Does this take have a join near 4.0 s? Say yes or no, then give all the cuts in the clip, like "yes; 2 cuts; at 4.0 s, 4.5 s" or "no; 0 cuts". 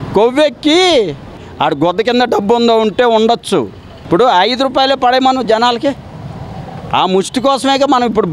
yes; 2 cuts; at 1.4 s, 4.0 s